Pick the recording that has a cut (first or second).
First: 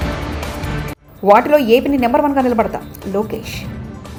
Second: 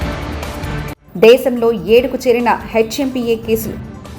second